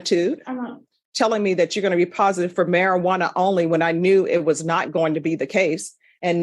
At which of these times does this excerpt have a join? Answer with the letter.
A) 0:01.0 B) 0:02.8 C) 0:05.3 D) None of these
A